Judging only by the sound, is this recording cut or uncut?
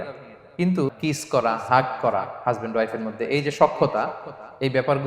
cut